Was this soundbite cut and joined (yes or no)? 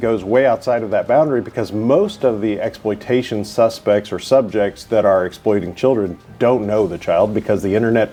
no